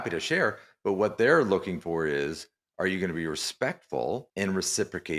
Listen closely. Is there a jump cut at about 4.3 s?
yes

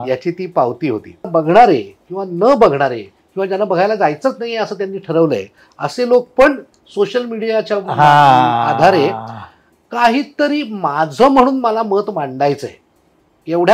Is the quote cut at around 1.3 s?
yes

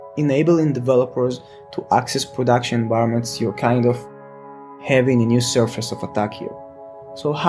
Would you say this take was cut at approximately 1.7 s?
no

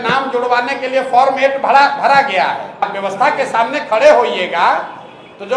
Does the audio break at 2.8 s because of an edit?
yes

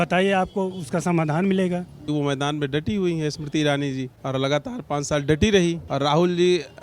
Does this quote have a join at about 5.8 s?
yes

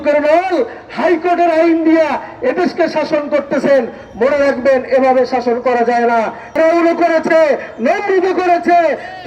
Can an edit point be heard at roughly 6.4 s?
yes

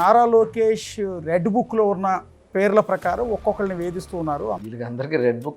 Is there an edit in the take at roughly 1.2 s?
no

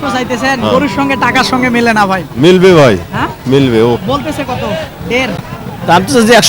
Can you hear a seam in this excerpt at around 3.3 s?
no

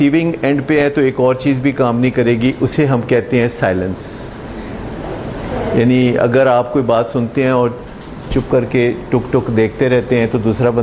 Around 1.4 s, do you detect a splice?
no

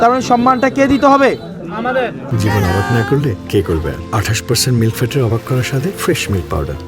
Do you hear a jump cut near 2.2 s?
yes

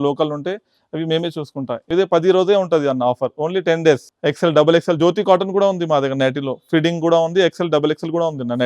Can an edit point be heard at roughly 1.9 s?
yes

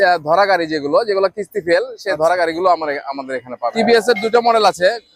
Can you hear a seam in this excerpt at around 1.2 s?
no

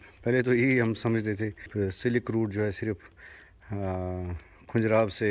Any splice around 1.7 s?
yes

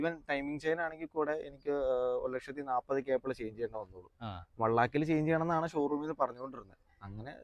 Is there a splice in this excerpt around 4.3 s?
no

